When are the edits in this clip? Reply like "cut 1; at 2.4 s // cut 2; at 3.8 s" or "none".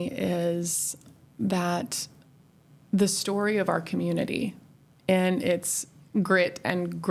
none